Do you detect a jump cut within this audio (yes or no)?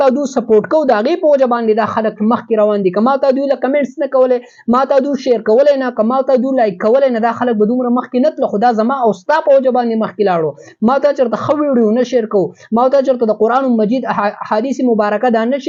no